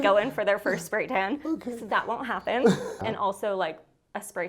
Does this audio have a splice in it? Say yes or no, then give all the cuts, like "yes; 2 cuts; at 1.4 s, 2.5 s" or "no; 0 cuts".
yes; 1 cut; at 3.0 s